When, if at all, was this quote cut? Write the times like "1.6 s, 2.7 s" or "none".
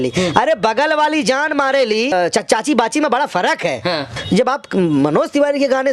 2.1 s, 4.1 s